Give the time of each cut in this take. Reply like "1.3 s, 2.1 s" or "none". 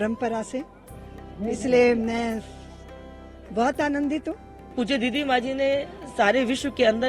4.7 s